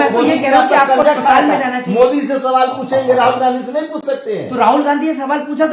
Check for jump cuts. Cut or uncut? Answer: uncut